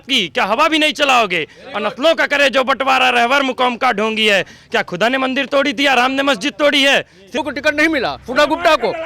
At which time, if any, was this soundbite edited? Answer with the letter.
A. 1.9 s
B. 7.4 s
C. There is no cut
B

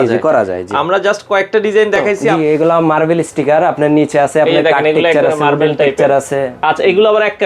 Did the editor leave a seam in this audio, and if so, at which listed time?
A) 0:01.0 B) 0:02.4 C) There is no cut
B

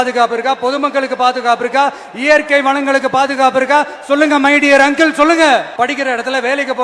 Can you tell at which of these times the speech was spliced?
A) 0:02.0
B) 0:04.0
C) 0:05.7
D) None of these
C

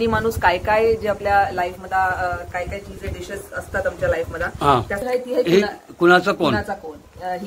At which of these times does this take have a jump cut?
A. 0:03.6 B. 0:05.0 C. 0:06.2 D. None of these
B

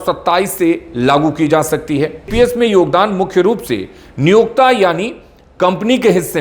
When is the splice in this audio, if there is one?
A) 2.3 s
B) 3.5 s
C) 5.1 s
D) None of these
A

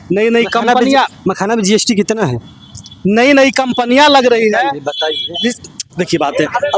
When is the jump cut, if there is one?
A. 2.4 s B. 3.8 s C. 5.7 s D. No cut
D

